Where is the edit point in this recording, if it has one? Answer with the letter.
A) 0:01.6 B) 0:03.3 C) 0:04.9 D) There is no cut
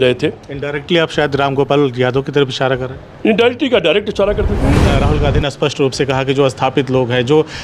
C